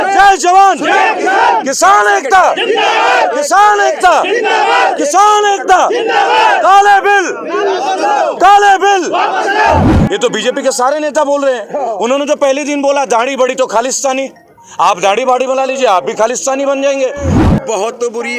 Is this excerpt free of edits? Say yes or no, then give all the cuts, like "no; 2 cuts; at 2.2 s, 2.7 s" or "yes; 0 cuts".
no; 2 cuts; at 9.9 s, 17.3 s